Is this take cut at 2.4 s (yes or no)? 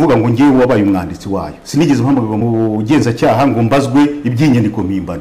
yes